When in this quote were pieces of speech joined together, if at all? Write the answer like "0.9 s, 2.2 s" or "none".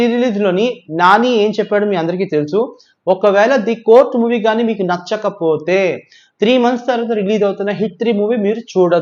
none

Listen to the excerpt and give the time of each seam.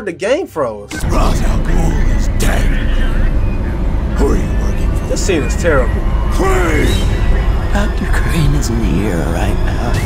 1.0 s

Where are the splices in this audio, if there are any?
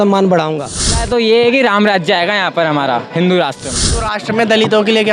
1.0 s, 4.1 s

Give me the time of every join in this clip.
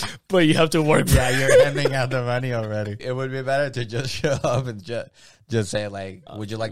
3.0 s

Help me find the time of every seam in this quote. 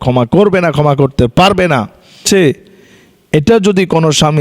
2.2 s

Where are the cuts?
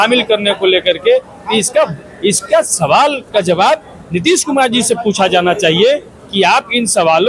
none

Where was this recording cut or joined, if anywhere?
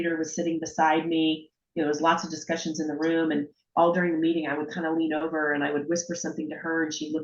none

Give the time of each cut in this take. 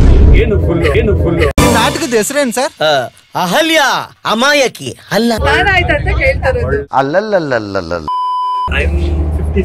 8.7 s

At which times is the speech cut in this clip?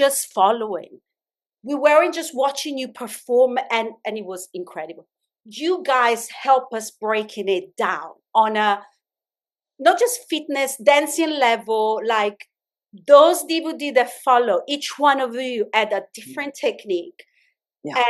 none

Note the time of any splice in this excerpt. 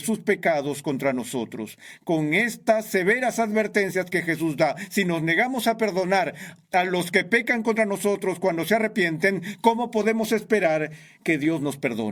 none

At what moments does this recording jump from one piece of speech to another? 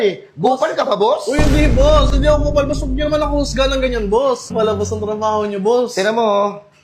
4.5 s

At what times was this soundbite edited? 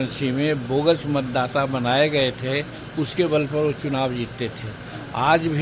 none

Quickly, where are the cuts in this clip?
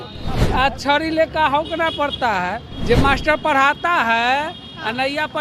2.7 s

